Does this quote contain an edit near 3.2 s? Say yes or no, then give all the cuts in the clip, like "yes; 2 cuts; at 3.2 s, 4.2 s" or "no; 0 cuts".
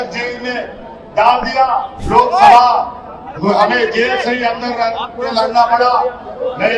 no; 1 cut; at 2.0 s